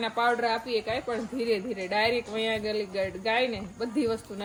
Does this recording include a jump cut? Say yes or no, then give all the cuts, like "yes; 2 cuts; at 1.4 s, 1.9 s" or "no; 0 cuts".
no; 0 cuts